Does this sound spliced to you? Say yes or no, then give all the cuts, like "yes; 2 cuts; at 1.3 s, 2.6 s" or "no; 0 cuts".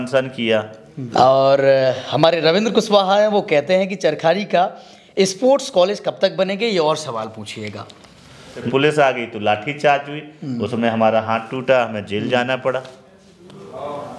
yes; 2 cuts; at 0.9 s, 8.6 s